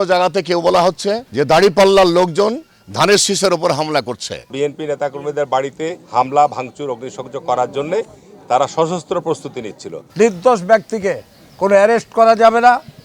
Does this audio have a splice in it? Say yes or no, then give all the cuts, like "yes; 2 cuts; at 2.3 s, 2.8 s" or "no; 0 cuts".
yes; 3 cuts; at 1.2 s, 4.5 s, 10.0 s